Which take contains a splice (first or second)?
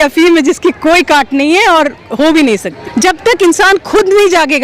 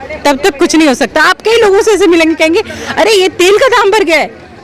first